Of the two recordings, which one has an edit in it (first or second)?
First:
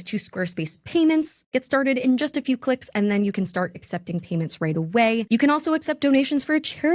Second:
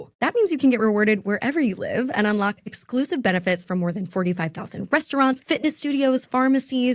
first